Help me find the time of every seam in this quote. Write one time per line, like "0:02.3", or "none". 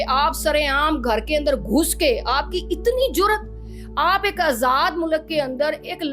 none